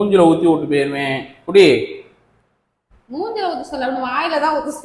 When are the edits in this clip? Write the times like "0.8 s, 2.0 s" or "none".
none

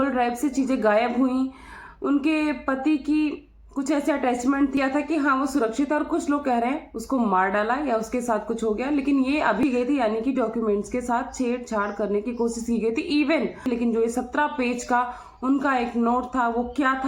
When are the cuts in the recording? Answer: 4.8 s, 9.6 s, 13.7 s

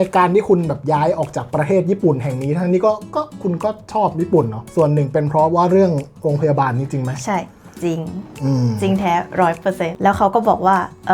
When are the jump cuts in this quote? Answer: 4.6 s, 9.9 s

